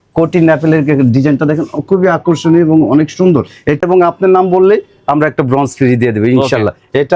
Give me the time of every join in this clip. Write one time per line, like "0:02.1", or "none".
0:03.8

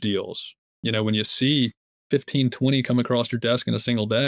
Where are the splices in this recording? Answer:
0:01.9

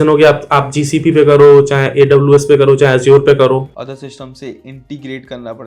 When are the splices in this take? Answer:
0:03.8

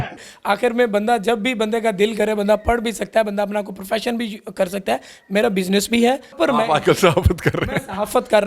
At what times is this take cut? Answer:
0:03.2
0:05.0
0:06.3

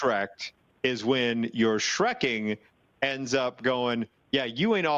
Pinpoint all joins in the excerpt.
none

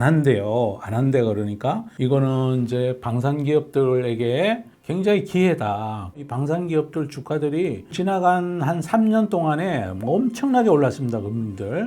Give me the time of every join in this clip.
0:01.9
0:06.2
0:07.9

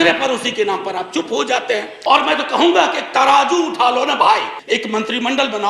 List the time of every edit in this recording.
0:01.9
0:04.5

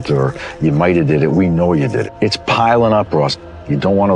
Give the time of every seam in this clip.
0:02.1

